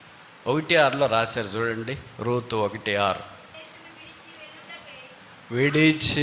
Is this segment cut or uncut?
cut